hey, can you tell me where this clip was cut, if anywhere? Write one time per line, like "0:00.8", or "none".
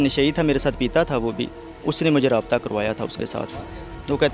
none